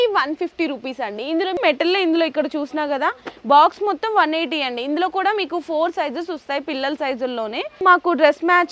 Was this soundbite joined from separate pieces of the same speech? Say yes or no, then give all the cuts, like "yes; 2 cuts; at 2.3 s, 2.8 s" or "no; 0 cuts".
yes; 2 cuts; at 1.6 s, 7.8 s